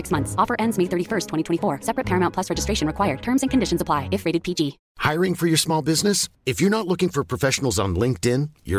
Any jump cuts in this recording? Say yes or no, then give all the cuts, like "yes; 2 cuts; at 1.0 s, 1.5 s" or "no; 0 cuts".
yes; 1 cut; at 4.9 s